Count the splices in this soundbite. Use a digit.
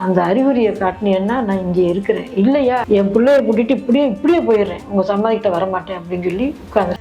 1